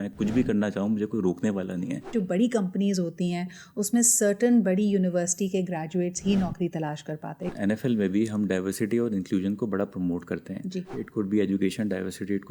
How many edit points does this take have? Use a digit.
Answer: 3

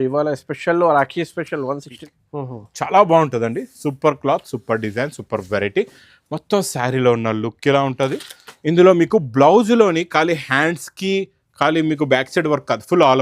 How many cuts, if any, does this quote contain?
1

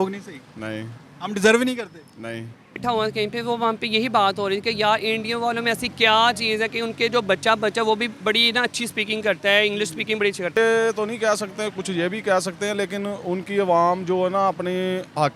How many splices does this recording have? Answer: 2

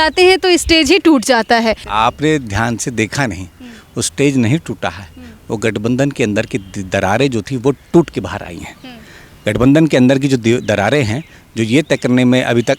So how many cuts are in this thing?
1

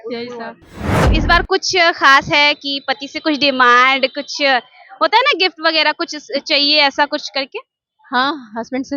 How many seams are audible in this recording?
1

